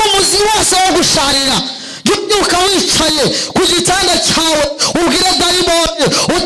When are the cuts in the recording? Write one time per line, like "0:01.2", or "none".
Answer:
none